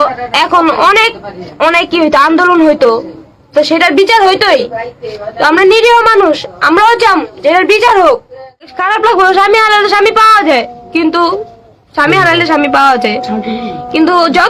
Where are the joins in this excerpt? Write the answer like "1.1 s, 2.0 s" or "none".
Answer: 8.8 s